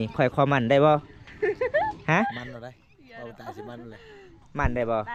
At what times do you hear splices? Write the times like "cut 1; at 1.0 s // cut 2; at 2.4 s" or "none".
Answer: none